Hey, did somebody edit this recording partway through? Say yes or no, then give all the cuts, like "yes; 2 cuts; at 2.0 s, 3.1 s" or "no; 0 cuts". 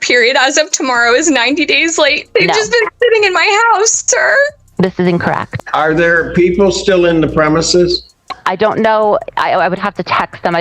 yes; 2 cuts; at 2.2 s, 5.5 s